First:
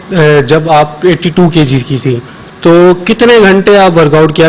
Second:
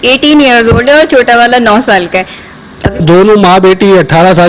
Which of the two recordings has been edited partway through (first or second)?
second